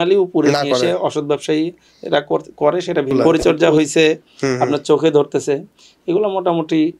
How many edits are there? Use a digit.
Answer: 1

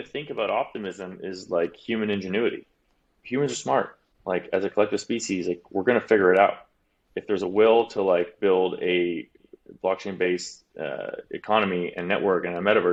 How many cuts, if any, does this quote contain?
0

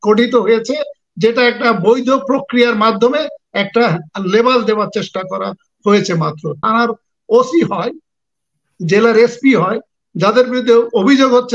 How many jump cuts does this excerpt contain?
1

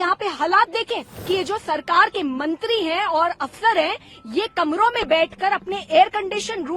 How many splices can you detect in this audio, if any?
1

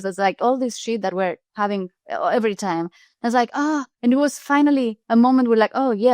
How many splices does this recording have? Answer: 3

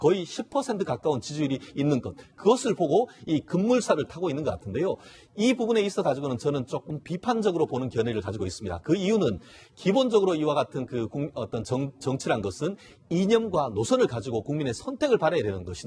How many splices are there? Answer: 1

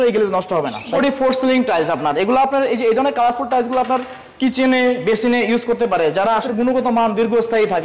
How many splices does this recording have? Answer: 2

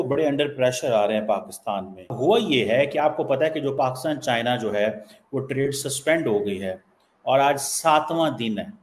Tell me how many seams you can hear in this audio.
1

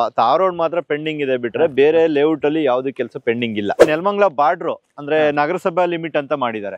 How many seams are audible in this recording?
1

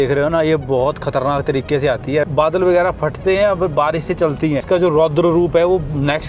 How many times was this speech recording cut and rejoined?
1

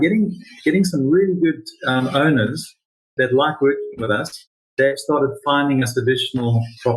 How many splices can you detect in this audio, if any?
1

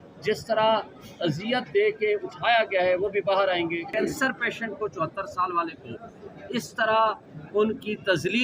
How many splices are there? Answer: 1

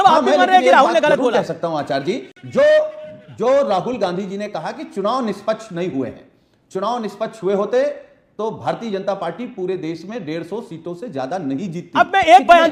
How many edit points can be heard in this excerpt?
0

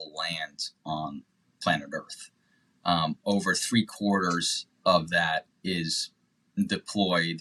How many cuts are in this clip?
0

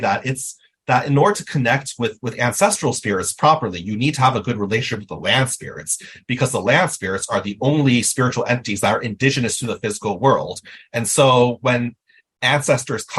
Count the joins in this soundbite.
1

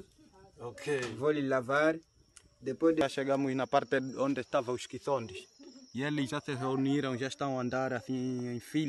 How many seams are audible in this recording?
1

